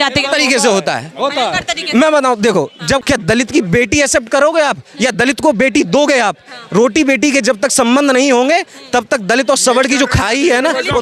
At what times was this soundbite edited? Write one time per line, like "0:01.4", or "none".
0:03.0